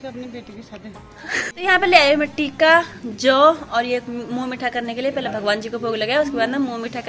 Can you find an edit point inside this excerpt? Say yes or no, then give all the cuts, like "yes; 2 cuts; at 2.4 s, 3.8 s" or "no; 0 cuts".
yes; 1 cut; at 1.5 s